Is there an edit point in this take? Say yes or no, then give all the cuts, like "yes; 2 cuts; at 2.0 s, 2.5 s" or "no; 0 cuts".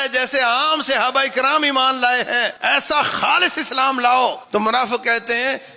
yes; 2 cuts; at 2.5 s, 4.4 s